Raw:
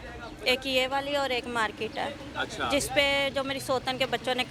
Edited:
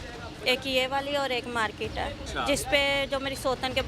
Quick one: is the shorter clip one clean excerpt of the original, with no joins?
no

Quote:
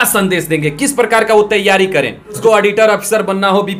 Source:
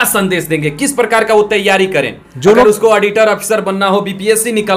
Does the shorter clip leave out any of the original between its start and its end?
yes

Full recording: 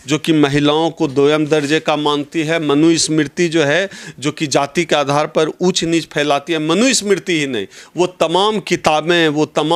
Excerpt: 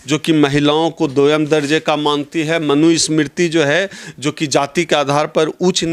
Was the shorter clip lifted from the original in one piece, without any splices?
yes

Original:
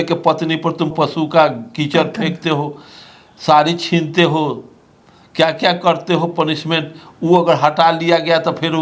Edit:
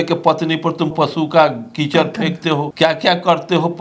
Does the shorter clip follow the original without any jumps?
no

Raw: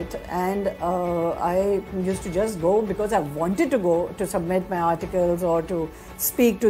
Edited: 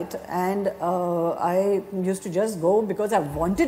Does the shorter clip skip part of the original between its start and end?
no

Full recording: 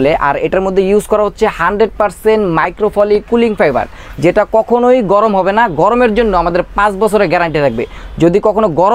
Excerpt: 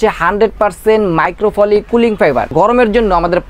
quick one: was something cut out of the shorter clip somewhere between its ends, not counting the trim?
yes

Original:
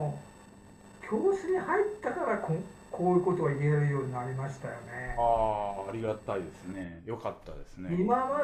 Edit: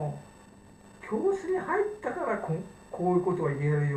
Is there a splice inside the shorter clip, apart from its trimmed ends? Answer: no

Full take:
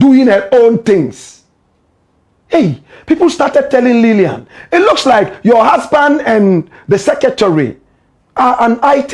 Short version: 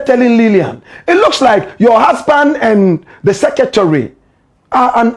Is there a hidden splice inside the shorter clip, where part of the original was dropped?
no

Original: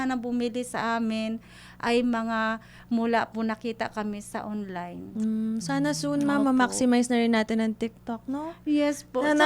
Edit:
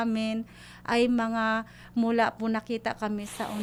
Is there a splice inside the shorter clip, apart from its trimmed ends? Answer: no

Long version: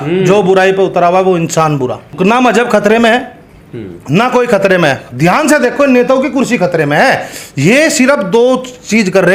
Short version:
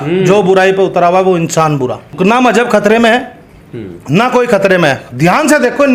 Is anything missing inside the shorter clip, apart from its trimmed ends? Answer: no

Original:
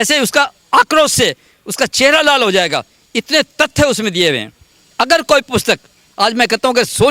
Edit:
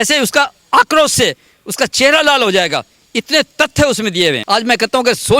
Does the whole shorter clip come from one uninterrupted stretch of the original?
no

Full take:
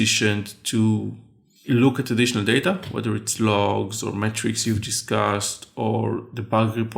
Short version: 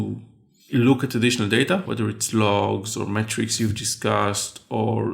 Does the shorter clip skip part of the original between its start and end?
yes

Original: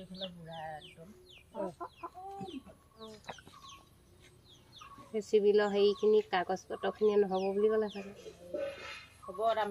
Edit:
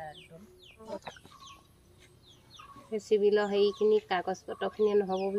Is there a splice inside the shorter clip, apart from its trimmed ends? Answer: yes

